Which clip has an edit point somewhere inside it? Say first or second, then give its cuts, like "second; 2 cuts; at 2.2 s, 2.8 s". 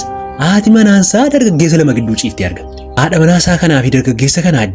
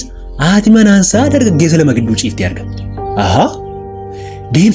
first; 1 cut; at 2.8 s